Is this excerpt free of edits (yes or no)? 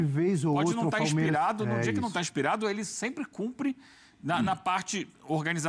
yes